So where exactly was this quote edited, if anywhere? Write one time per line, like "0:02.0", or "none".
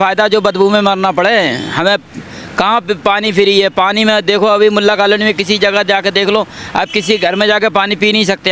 none